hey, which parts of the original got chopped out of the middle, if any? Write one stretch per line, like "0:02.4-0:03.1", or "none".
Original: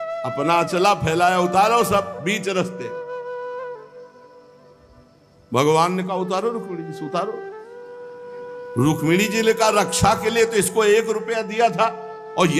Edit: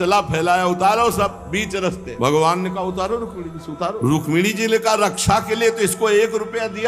0:02.8-0:05.4
0:07.3-0:08.7